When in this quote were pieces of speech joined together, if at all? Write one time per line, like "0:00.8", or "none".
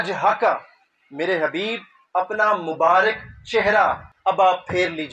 0:04.1